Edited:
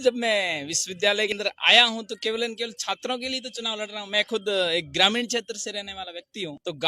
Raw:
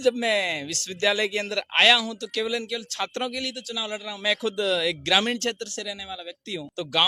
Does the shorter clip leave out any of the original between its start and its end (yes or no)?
yes